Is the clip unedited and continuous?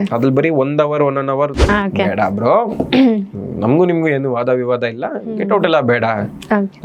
no; 1 cut; at 1.6 s

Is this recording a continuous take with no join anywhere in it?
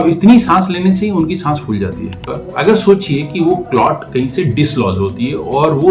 no; 1 cut; at 2.3 s

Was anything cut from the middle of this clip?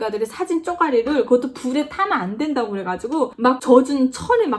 no; 0 cuts

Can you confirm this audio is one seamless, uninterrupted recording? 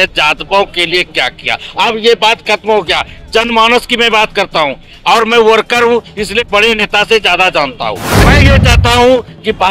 no; 1 cut; at 8.2 s

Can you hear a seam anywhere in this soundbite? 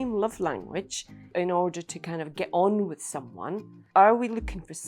yes; 1 cut; at 3.8 s

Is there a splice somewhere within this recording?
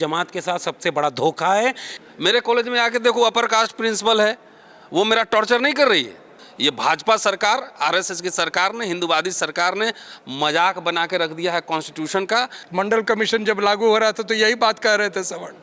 yes; 3 cuts; at 1.9 s, 6.4 s, 12.6 s

